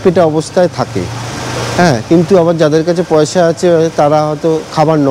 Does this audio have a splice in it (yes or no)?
no